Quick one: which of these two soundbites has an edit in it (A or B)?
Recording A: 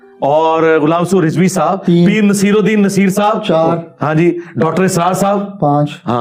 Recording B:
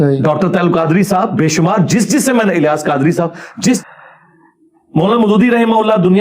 B